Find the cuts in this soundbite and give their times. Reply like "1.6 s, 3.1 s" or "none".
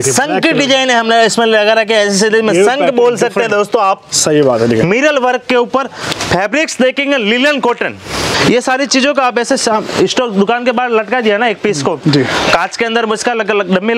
8.3 s